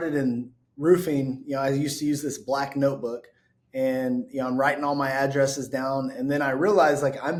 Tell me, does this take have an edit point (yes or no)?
no